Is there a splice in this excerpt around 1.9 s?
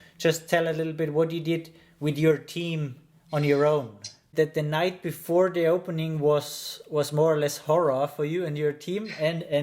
no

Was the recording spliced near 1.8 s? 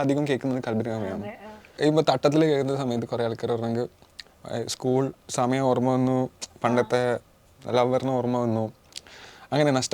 yes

